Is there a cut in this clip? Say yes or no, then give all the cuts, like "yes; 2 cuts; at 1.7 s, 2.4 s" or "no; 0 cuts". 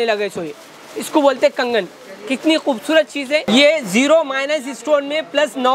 yes; 1 cut; at 3.4 s